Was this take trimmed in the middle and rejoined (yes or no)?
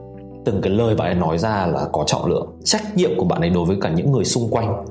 yes